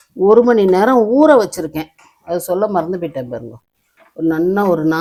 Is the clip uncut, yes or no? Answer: yes